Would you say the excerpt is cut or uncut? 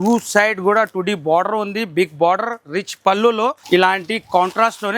cut